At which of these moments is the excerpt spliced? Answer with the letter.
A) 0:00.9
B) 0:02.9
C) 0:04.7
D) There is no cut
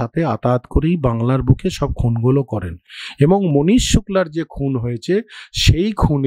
D